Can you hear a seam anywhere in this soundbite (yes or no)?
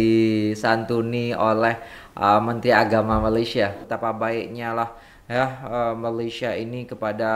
yes